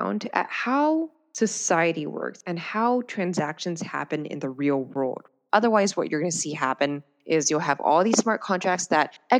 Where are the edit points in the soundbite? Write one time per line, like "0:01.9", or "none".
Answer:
0:01.2
0:05.3